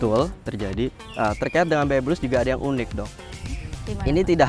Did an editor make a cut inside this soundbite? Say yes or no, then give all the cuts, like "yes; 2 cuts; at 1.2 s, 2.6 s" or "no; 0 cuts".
yes; 1 cut; at 1.0 s